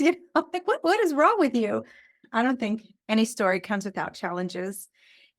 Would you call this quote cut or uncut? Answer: cut